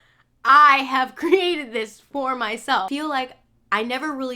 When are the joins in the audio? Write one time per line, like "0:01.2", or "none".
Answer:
0:02.9